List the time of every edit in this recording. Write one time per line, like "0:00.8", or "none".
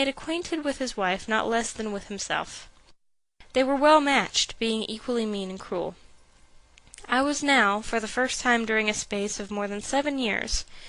0:03.8